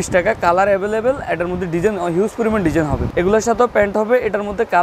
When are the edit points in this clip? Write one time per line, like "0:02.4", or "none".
0:03.1